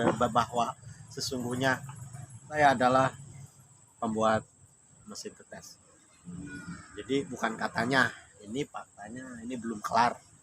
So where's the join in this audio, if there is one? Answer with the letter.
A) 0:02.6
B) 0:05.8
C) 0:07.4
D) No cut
A